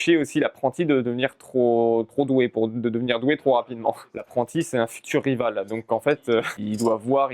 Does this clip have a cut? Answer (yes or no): yes